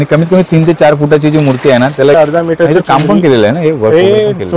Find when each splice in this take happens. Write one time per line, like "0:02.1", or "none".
0:02.2